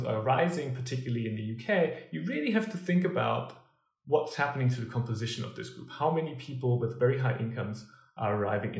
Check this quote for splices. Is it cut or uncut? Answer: uncut